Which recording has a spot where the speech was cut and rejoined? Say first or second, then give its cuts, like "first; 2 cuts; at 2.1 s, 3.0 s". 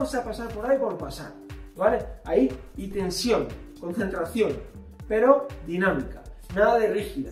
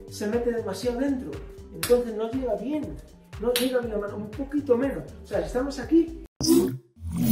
second; 1 cut; at 6.2 s